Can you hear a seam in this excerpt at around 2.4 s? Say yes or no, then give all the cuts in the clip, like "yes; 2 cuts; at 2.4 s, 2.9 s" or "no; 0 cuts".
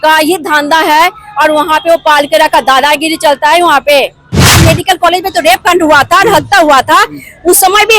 no; 1 cut; at 4.6 s